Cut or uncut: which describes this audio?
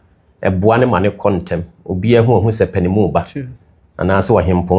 uncut